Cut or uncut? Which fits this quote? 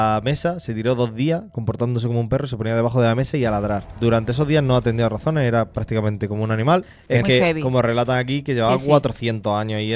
cut